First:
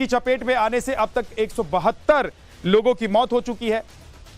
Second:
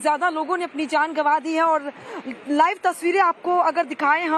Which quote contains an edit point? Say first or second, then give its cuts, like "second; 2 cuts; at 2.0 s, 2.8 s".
first; 1 cut; at 1.6 s